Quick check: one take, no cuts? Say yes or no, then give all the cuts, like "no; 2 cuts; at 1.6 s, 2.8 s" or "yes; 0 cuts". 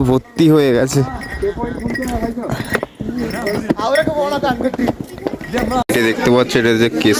no; 1 cut; at 5.8 s